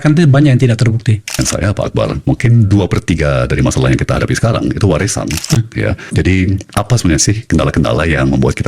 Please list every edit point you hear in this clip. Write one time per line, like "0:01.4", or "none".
0:01.4
0:05.6